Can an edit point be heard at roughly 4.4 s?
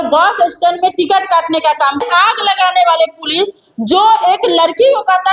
no; 1 cut; at 2.0 s

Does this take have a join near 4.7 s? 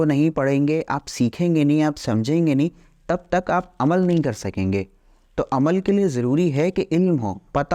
no; 0 cuts

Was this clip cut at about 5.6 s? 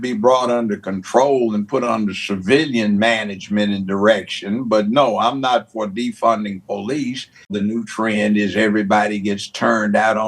no; 1 cut; at 7.5 s

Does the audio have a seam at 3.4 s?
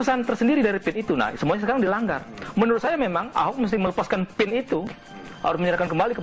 no; 1 cut; at 1.7 s

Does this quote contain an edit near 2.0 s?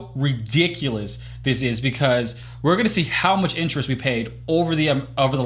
no; 0 cuts

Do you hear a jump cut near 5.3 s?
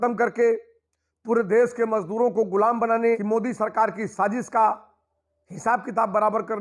no; 1 cut; at 3.2 s

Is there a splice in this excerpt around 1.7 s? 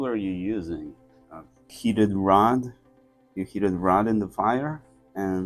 yes; 1 cut; at 1.7 s

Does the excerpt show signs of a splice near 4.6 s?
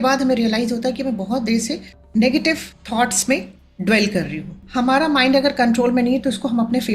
yes; 1 cut; at 4.6 s

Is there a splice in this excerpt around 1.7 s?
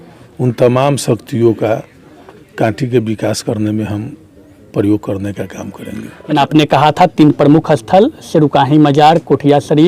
no; 1 cut; at 6.3 s

